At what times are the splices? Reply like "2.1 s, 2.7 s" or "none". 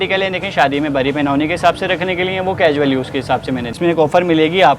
3.7 s